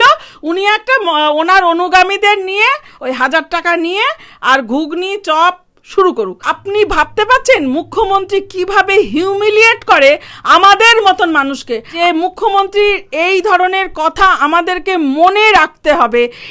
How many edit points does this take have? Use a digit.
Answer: 3